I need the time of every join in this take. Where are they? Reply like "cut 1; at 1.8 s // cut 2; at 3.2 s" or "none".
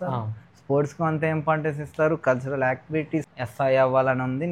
cut 1; at 3.3 s